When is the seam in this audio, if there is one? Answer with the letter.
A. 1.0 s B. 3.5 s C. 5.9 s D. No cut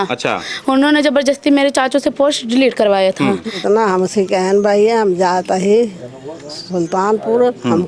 B